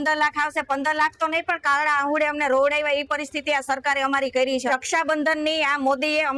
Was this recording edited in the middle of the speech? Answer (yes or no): yes